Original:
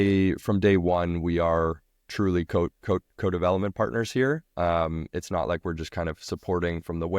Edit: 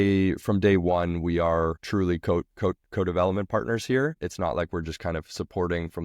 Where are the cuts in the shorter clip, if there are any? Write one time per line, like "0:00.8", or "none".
0:01.8
0:04.2